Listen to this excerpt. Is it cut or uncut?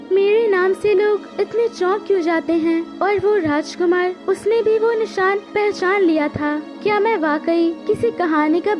cut